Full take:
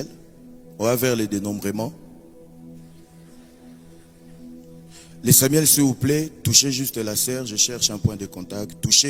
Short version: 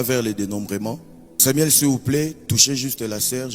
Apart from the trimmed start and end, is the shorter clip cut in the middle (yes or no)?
yes